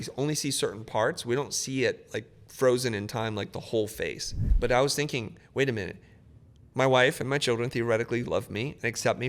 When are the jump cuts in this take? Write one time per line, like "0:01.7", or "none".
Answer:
none